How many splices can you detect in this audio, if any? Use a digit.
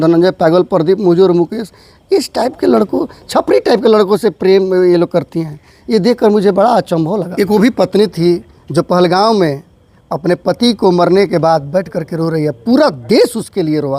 1